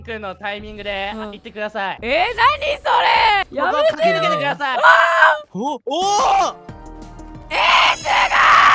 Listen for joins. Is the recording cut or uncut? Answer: uncut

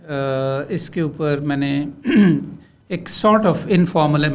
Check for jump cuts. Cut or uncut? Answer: uncut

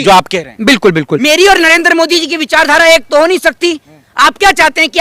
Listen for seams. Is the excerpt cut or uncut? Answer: cut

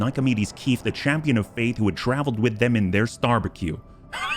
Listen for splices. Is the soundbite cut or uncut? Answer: uncut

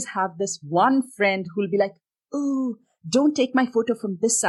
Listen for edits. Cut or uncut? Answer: uncut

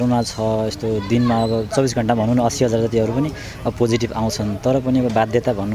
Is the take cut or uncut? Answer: uncut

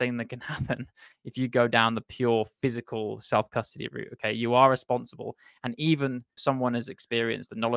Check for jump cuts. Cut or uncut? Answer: uncut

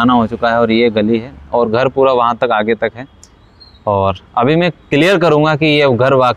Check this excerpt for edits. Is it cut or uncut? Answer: uncut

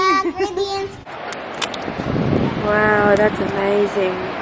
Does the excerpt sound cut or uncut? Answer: cut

